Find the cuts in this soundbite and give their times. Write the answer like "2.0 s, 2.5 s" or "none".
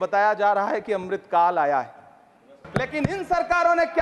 2.6 s